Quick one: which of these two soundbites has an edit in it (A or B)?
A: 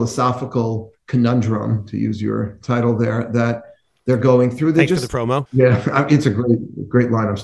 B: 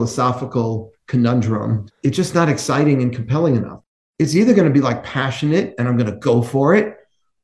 B